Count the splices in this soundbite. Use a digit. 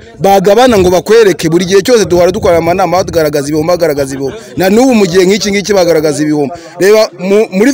0